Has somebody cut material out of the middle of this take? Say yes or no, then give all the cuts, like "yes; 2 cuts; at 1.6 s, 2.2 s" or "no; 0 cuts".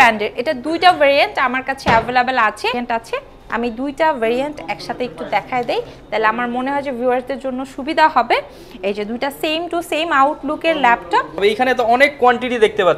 yes; 2 cuts; at 2.8 s, 11.4 s